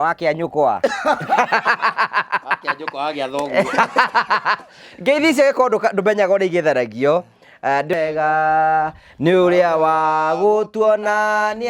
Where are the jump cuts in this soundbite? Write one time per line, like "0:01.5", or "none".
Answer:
0:07.9